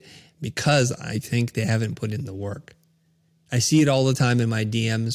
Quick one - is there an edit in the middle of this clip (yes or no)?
no